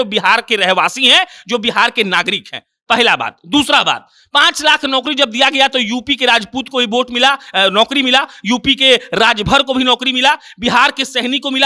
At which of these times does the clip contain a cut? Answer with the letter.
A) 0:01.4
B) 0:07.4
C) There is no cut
C